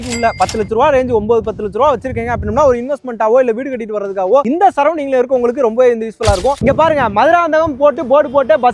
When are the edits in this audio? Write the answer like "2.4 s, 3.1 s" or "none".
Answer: 6.6 s